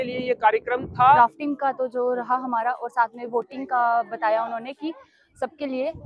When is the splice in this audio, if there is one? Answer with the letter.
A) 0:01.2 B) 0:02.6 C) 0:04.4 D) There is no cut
A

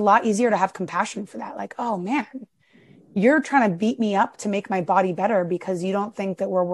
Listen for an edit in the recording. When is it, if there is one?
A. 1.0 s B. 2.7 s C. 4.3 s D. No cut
D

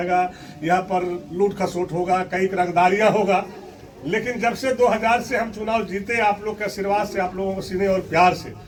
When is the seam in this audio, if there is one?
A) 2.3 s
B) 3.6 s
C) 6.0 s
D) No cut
D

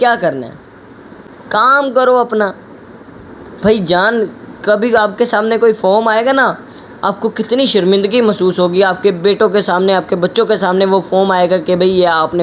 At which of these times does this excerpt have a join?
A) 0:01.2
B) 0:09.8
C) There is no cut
C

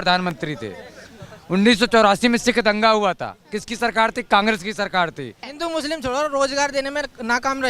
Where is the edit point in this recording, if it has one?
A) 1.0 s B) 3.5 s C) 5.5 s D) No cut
C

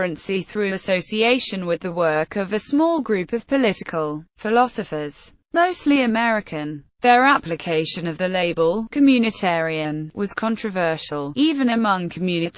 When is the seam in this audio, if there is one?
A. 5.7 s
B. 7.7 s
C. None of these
A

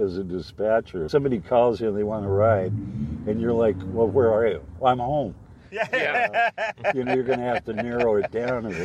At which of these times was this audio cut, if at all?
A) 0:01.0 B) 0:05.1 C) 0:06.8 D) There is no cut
A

